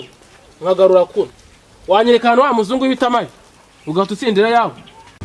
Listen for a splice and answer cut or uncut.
uncut